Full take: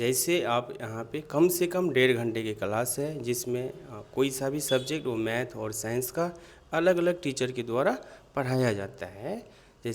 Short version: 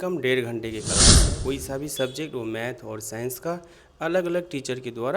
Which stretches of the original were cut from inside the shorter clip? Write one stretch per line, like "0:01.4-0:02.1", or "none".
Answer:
0:03.0-0:04.0